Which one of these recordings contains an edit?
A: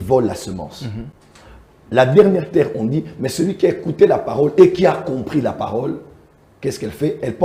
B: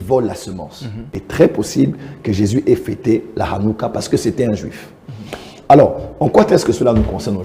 B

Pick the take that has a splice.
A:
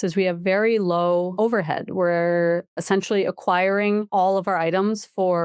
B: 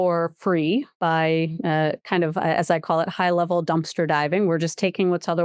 A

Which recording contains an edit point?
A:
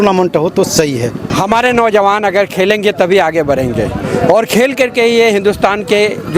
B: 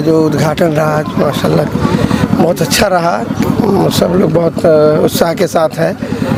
A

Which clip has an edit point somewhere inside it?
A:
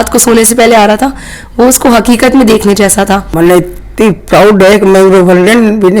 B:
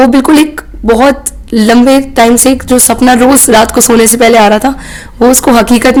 A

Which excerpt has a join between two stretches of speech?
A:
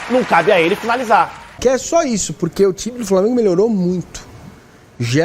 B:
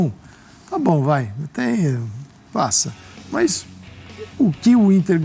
A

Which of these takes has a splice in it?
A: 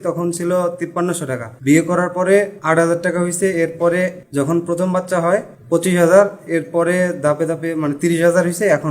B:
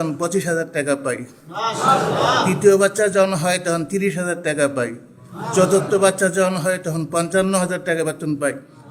A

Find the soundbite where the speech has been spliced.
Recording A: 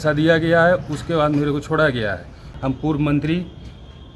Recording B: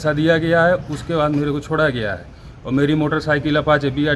A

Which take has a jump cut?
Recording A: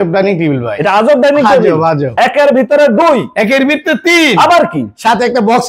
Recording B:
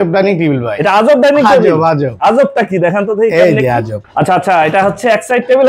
A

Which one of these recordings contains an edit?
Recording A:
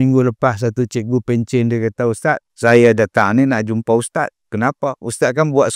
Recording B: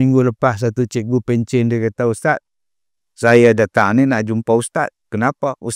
A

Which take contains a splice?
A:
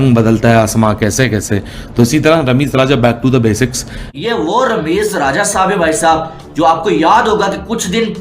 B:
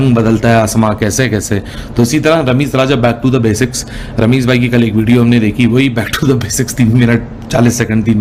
A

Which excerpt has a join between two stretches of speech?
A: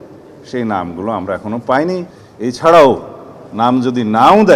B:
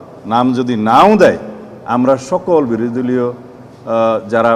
A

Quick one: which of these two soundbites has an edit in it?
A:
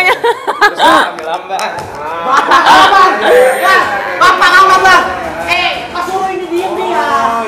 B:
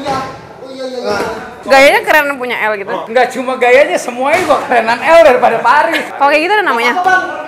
B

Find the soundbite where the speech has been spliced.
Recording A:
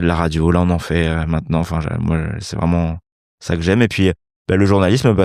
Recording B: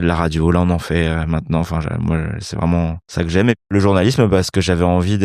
B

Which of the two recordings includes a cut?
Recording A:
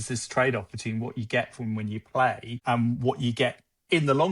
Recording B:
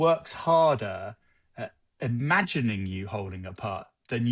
A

